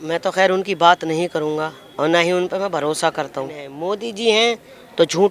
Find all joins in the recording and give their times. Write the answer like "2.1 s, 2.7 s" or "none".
3.7 s